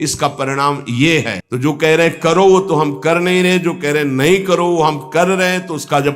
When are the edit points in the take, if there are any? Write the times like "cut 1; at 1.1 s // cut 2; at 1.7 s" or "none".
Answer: cut 1; at 1.4 s